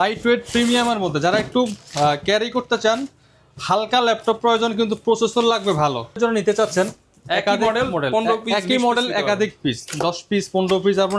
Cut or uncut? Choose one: cut